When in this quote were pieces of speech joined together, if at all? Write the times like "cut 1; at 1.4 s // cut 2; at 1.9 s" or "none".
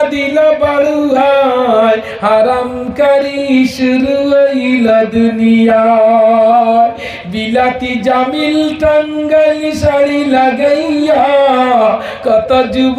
none